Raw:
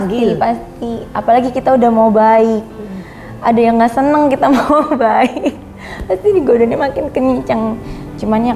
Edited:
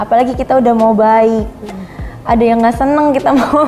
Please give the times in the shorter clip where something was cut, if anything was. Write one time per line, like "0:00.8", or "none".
none